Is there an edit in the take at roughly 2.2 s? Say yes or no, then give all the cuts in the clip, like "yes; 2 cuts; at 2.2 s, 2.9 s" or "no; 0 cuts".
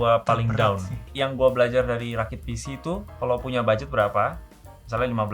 no; 1 cut; at 1.0 s